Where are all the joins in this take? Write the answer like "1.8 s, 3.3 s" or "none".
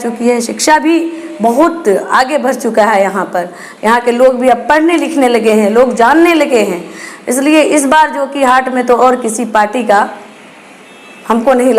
none